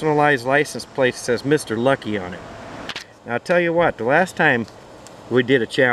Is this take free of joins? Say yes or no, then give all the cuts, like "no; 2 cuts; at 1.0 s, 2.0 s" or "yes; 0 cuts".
no; 1 cut; at 2.9 s